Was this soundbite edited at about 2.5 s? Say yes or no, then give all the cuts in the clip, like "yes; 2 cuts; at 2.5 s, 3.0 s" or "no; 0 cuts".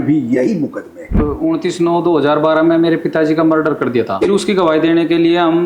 no; 2 cuts; at 1.2 s, 4.2 s